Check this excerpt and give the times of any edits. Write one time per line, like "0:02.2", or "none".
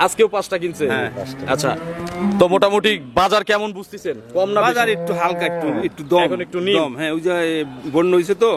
none